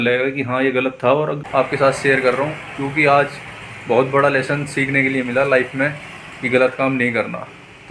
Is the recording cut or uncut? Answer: cut